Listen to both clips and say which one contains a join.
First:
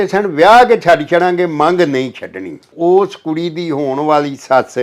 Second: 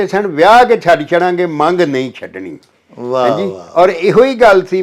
first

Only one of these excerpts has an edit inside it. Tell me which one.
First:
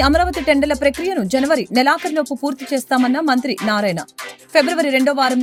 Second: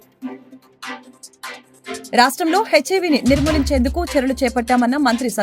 second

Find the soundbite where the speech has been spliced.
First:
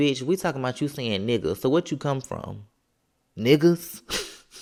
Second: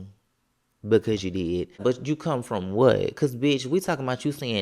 second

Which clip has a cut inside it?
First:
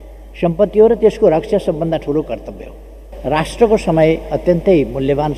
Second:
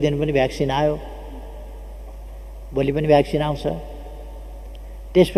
first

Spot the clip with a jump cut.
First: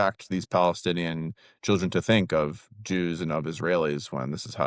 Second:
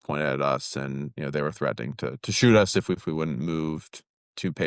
second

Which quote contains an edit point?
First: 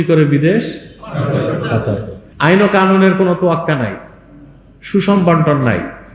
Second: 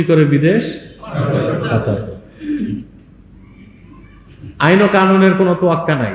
first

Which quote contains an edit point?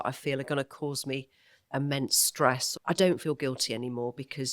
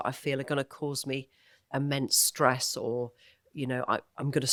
first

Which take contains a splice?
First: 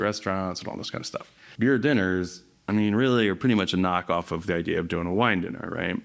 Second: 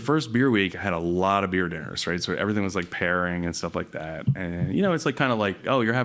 first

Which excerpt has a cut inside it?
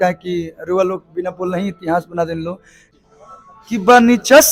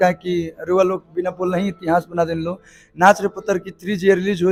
first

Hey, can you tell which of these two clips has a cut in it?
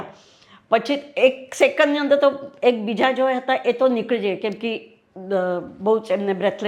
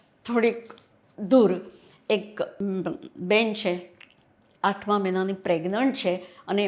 second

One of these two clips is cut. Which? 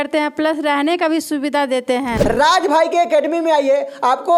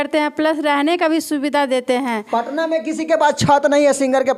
first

